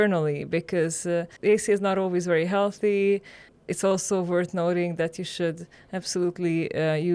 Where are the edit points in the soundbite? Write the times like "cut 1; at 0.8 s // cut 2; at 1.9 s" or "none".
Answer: cut 1; at 1.3 s